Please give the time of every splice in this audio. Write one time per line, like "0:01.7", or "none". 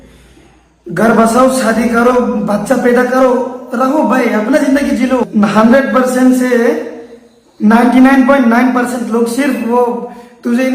0:05.3